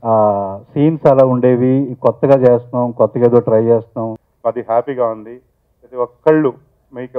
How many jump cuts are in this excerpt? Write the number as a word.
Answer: one